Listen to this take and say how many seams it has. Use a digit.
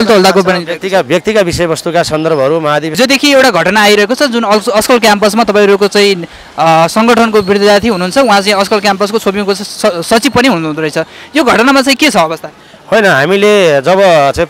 1